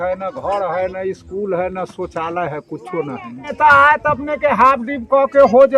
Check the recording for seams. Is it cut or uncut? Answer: cut